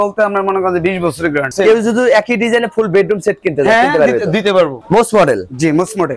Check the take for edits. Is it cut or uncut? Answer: cut